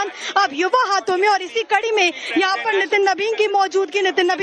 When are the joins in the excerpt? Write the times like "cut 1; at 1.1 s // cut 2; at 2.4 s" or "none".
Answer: cut 1; at 1.5 s